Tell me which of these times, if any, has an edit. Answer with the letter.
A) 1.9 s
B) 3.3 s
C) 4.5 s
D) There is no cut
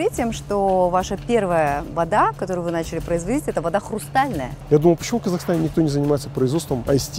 C